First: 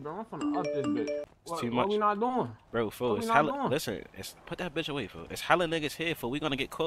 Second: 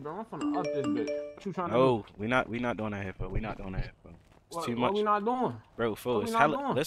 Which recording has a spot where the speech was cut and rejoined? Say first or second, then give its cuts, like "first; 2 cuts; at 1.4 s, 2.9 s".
first; 1 cut; at 1.3 s